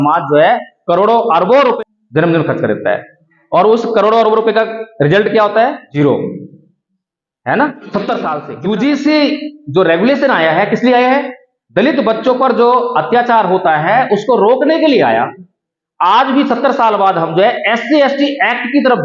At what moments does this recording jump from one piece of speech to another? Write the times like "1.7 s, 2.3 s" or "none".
1.8 s, 5.9 s, 8.4 s